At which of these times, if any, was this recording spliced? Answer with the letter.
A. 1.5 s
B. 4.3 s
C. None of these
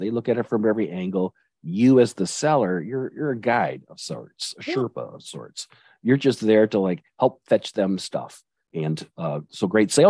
C